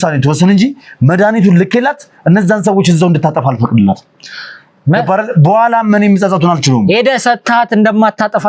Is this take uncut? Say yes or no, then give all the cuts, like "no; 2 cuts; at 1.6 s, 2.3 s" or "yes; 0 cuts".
yes; 0 cuts